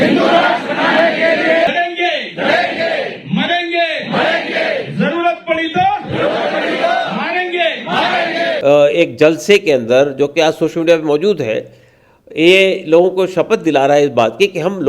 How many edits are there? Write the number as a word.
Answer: two